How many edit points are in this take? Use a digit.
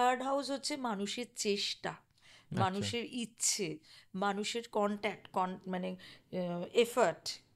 0